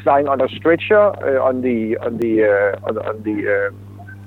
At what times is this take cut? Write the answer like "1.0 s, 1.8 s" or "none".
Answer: none